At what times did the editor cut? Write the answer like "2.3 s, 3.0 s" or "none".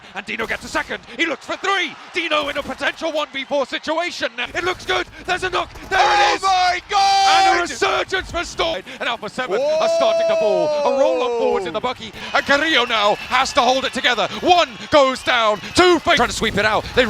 4.4 s, 8.7 s, 12.2 s, 16.2 s